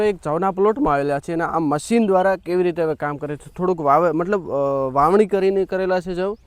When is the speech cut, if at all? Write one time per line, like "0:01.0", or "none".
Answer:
none